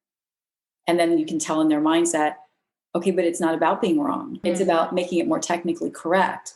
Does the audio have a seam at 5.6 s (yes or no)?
no